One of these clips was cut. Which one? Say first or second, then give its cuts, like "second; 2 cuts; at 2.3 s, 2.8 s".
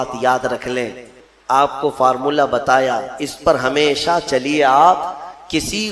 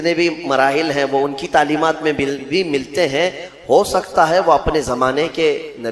first; 1 cut; at 1.2 s